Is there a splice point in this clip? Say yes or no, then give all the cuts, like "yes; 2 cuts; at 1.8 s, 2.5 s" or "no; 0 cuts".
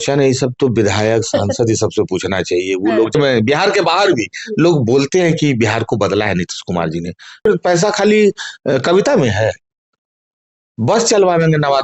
yes; 2 cuts; at 3.1 s, 7.5 s